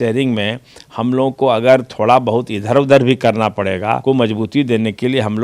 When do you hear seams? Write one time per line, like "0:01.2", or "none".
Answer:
0:04.0